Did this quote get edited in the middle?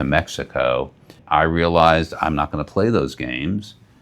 yes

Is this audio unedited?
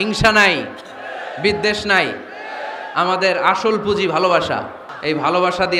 no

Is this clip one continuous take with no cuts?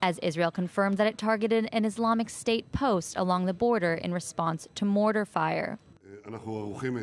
yes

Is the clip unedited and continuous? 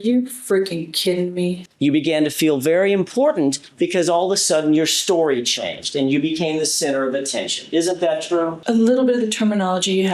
no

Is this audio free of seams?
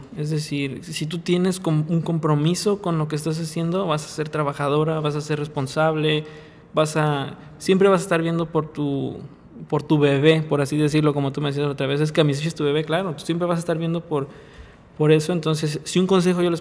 yes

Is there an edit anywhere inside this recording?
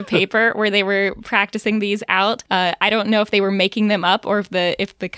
yes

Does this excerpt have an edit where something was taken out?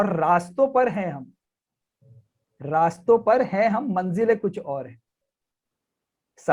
no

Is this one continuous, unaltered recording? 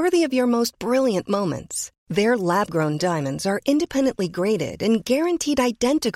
yes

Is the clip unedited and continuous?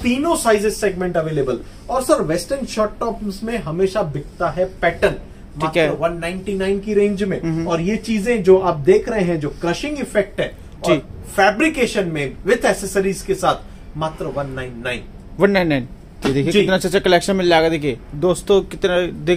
yes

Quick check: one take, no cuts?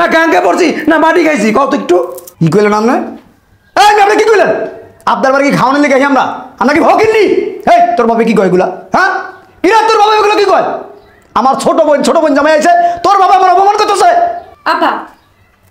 no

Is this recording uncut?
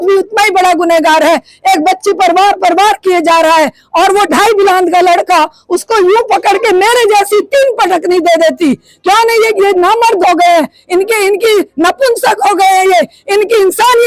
yes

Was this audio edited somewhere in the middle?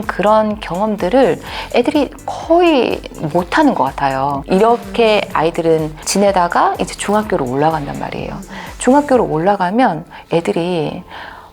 yes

